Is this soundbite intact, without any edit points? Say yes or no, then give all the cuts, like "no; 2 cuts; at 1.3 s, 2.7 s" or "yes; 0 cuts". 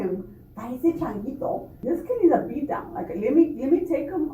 no; 1 cut; at 1.7 s